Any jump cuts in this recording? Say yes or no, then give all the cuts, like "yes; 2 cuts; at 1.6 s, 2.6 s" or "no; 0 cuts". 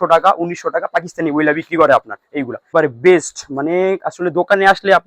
yes; 1 cut; at 2.7 s